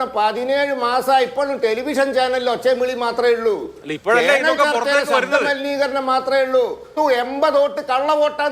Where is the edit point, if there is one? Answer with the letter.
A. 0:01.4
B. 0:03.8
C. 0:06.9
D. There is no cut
C